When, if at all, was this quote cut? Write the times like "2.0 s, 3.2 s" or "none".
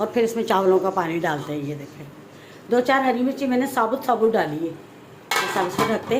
none